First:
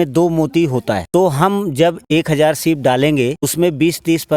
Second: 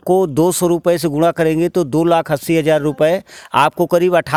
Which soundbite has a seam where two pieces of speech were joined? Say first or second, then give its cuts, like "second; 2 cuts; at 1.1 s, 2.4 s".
first; 3 cuts; at 1.0 s, 2.0 s, 3.4 s